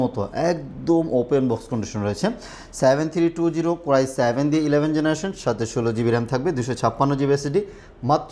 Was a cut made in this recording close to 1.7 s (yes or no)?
no